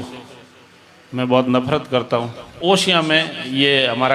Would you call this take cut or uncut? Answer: cut